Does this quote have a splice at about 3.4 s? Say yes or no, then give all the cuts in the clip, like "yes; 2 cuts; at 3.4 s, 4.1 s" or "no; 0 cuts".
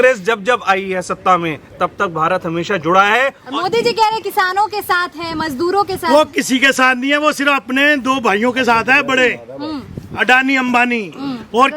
yes; 1 cut; at 3.4 s